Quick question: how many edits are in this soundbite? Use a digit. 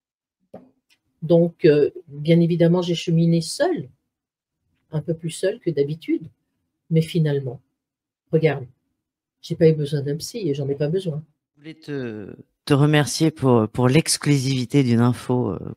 1